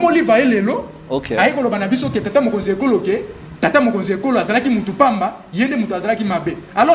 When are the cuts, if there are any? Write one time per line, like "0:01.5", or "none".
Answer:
none